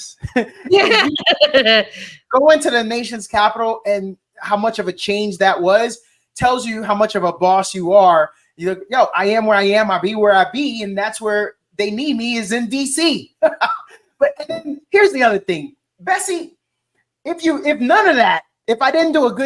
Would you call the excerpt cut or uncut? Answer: uncut